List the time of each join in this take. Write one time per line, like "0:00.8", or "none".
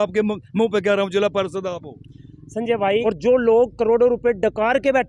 0:03.0